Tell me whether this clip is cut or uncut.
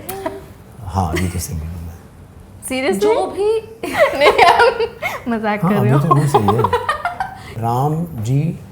cut